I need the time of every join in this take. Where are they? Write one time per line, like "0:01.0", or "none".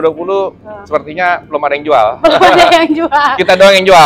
none